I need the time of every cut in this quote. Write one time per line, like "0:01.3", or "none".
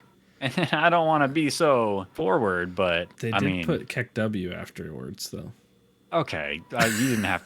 0:02.1
0:03.1